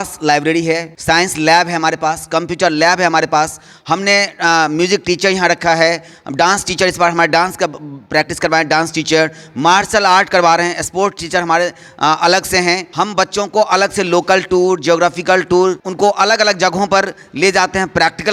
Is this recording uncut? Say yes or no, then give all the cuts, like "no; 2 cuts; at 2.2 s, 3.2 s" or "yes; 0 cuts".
no; 3 cuts; at 0.9 s, 12.9 s, 15.9 s